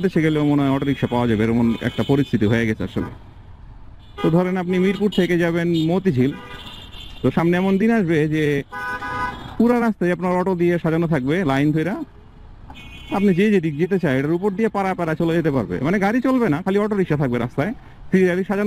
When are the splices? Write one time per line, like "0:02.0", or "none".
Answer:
none